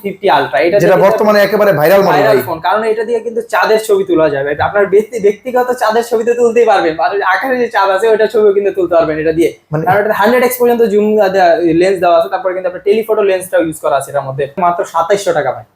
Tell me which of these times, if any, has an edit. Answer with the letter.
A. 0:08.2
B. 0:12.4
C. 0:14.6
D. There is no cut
C